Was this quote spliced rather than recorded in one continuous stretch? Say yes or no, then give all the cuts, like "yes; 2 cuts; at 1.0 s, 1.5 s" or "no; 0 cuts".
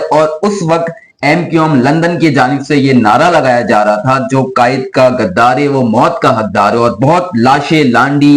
no; 0 cuts